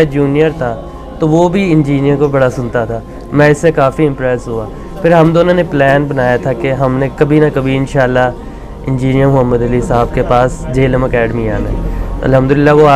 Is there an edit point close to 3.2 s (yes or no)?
no